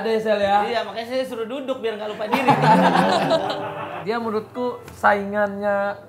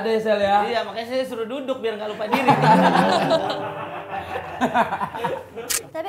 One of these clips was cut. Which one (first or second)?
first